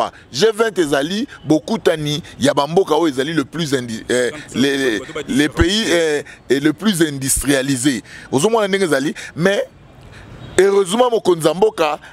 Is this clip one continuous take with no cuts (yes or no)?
yes